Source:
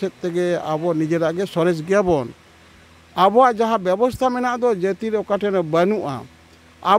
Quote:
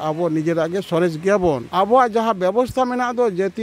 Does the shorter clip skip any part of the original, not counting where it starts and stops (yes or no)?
yes